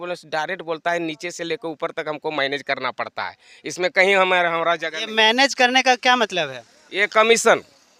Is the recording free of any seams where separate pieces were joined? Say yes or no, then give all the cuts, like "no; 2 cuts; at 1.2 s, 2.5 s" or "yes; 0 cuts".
yes; 0 cuts